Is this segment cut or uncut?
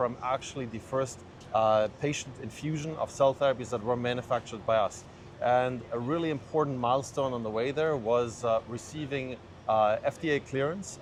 uncut